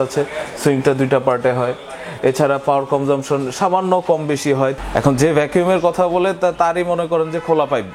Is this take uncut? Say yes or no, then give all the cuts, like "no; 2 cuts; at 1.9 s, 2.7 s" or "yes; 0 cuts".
no; 1 cut; at 4.8 s